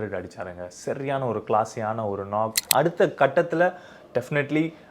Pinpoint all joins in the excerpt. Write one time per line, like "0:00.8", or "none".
0:02.6